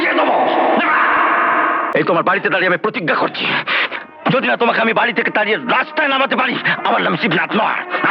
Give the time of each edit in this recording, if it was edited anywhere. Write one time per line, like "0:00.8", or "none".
0:01.9